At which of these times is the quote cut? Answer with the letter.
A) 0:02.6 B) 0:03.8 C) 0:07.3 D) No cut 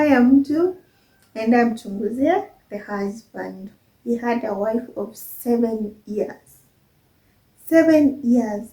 B